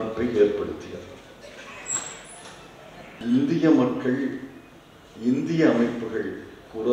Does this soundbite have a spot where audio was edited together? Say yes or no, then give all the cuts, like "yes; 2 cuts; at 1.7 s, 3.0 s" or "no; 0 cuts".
yes; 1 cut; at 3.1 s